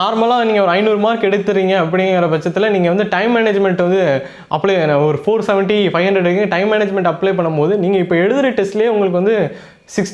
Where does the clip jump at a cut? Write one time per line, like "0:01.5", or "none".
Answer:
none